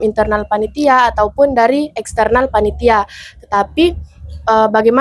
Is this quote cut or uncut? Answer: uncut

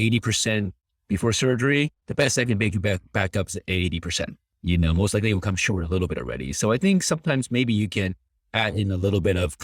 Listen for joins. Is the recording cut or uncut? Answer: cut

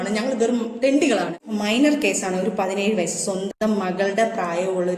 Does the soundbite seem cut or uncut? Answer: cut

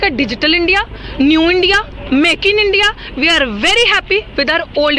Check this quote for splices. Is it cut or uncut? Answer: uncut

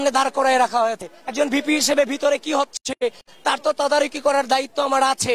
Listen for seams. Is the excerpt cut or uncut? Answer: uncut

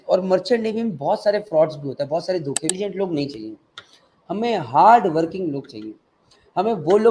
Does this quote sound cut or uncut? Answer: cut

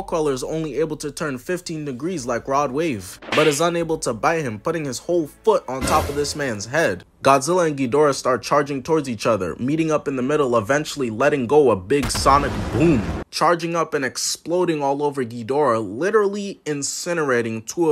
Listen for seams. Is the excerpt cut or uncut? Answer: cut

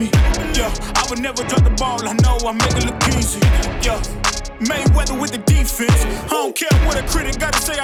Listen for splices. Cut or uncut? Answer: uncut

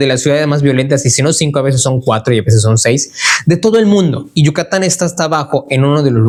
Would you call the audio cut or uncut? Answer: uncut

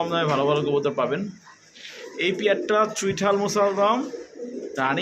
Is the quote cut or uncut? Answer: uncut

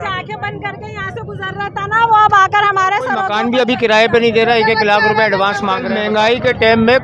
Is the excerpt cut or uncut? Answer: cut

